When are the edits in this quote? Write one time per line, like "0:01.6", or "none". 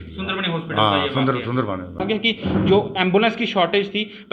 0:02.0